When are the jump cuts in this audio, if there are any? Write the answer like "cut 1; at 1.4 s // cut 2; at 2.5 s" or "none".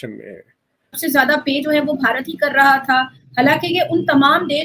cut 1; at 1.0 s